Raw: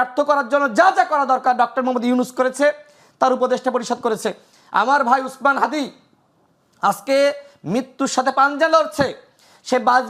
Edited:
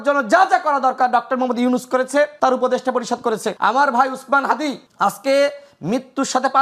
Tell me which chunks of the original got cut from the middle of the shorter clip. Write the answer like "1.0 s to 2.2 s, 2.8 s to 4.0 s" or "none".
2.8 s to 3.1 s, 4.3 s to 4.6 s, 6.0 s to 6.7 s